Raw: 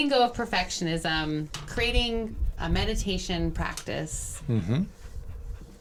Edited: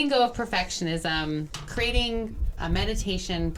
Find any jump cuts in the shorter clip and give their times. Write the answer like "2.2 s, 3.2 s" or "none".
none